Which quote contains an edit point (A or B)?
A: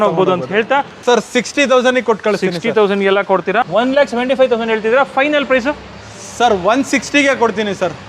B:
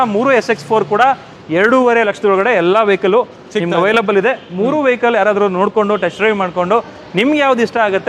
A